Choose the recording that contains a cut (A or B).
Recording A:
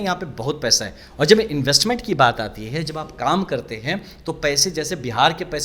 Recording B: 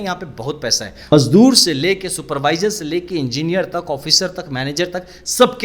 B